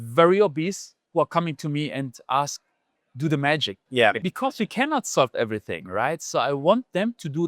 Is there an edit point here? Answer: yes; 1 cut; at 0.9 s

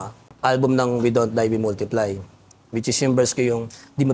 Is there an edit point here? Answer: no; 0 cuts

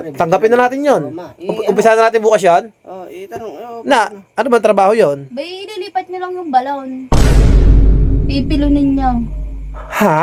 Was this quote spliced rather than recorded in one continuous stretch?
no; 0 cuts

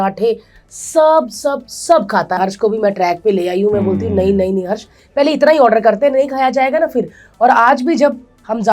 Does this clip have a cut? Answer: yes; 1 cut; at 2.4 s

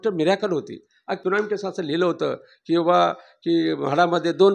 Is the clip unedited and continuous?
no; 1 cut; at 1.2 s

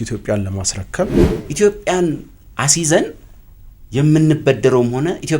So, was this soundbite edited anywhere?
yes; 1 cut; at 1.3 s

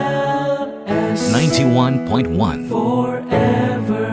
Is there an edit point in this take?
no; 0 cuts

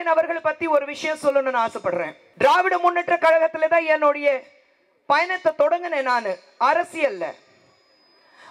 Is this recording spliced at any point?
yes; 1 cut; at 2.2 s

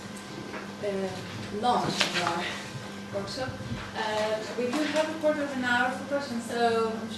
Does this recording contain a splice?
no; 0 cuts

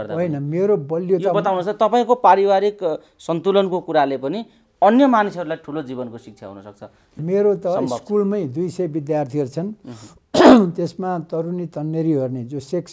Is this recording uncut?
no; 1 cut; at 7.1 s

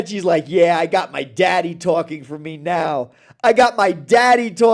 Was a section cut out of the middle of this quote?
no; 0 cuts

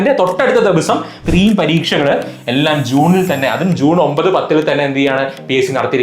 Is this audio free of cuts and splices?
no; 1 cut; at 1.2 s

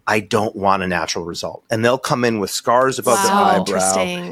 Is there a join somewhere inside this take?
no; 0 cuts

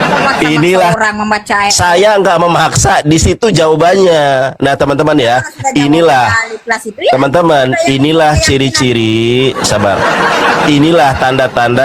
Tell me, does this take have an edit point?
yes; 1 cut; at 0.9 s

